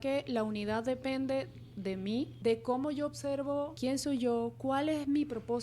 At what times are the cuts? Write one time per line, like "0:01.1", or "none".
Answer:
0:02.3
0:03.7